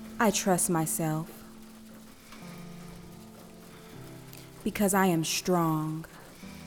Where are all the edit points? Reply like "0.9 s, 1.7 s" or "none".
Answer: none